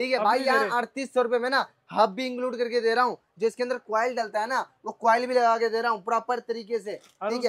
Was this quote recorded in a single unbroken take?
yes; 0 cuts

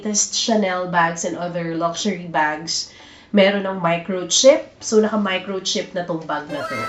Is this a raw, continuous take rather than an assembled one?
yes; 0 cuts

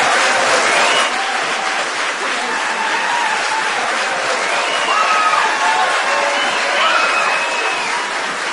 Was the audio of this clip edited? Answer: no; 0 cuts

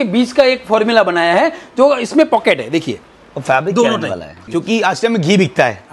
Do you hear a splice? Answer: yes; 1 cut; at 4.3 s

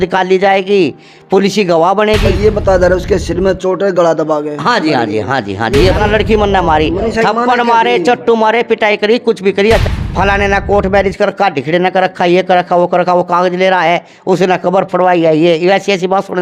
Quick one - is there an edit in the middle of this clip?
yes; 3 cuts; at 2.3 s, 6.0 s, 9.8 s

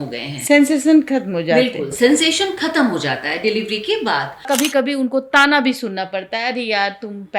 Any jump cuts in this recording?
yes; 1 cut; at 4.4 s

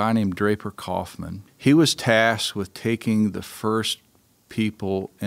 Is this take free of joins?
no; 1 cut; at 1.4 s

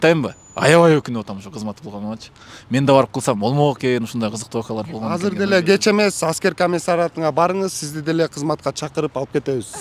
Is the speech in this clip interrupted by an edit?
no; 0 cuts

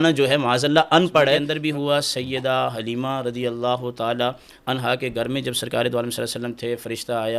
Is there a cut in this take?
yes; 1 cut; at 1.5 s

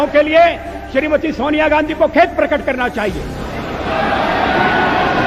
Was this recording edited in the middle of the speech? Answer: no; 0 cuts

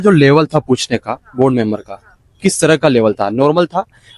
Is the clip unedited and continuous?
yes; 0 cuts

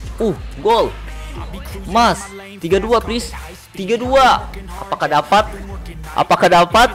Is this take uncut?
yes; 0 cuts

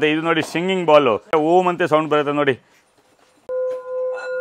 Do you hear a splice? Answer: yes; 2 cuts; at 1.3 s, 3.4 s

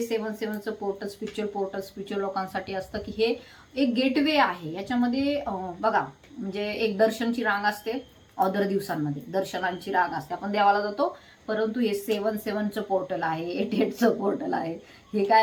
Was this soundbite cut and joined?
no; 0 cuts

